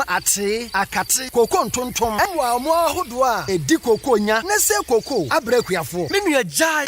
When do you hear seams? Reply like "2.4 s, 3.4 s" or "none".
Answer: 2.3 s